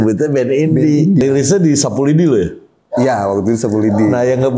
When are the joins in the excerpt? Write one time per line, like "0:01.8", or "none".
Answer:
0:01.2